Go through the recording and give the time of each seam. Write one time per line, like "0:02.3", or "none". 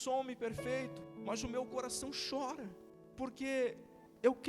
0:01.1
0:02.4

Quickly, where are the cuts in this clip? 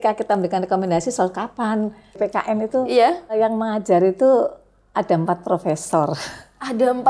0:02.1
0:03.3

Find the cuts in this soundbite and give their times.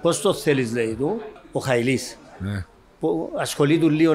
0:01.4

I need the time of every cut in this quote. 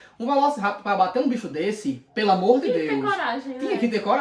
none

